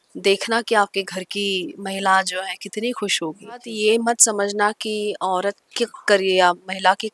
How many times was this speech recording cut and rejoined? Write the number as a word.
one